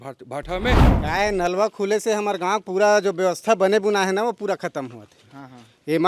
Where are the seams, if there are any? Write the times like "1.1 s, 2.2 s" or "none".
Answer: 0.9 s